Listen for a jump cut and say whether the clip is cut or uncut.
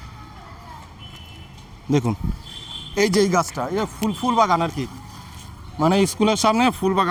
uncut